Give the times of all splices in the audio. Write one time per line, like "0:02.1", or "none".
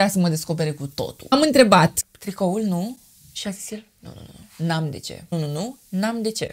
0:01.3
0:02.0